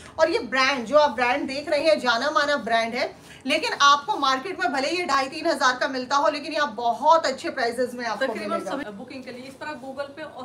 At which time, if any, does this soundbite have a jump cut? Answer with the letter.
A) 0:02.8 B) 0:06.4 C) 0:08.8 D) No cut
C